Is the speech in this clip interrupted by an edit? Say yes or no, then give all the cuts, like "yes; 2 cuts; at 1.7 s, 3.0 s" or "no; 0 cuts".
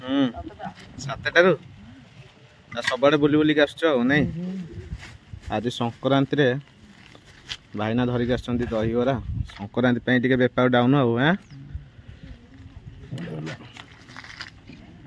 no; 0 cuts